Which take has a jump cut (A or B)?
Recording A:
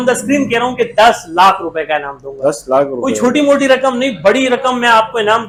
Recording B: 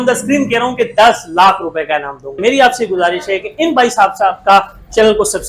B